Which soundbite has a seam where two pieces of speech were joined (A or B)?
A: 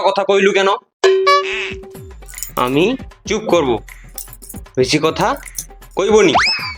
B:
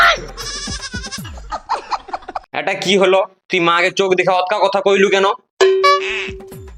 B